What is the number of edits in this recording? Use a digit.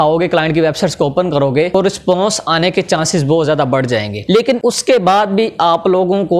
0